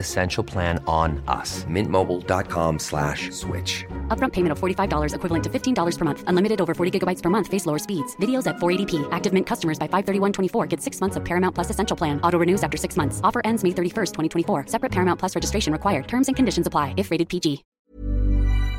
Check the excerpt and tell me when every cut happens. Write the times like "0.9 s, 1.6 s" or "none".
17.7 s